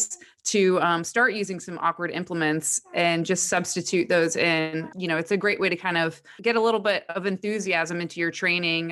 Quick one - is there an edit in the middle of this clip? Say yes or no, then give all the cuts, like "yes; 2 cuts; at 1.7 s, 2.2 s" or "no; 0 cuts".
yes; 2 cuts; at 4.9 s, 6.3 s